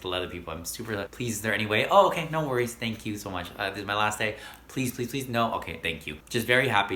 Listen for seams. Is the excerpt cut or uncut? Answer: uncut